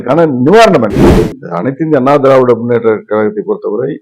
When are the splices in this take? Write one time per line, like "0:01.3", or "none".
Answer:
0:01.0